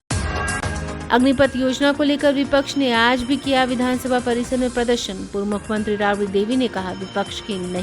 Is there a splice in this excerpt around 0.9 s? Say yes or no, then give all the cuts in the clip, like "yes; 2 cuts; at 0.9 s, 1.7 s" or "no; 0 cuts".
yes; 1 cut; at 0.9 s